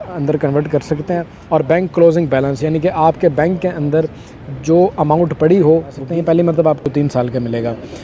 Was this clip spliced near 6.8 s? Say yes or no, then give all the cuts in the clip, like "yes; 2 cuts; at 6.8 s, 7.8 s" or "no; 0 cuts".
yes; 3 cuts; at 1.3 s, 6.0 s, 6.8 s